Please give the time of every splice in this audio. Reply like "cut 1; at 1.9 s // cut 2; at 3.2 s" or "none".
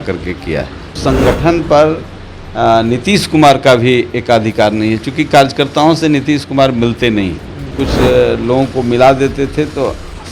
cut 1; at 1.0 s // cut 2; at 7.8 s